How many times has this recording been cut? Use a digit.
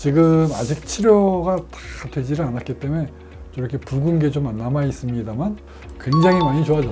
1